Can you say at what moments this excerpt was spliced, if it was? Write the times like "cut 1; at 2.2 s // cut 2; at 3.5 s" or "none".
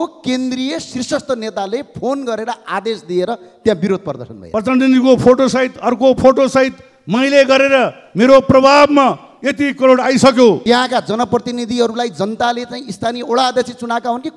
cut 1; at 4.4 s // cut 2; at 10.6 s